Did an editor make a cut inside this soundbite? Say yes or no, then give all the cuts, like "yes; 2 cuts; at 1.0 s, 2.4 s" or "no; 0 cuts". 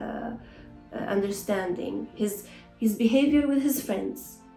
no; 0 cuts